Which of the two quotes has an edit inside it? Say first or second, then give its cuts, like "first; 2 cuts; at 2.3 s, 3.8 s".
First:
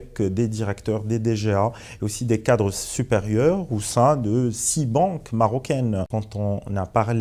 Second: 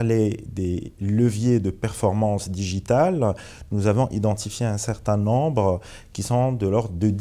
first; 1 cut; at 6.1 s